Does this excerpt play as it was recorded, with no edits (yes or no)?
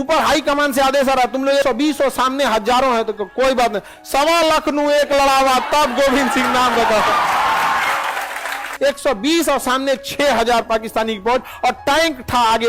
no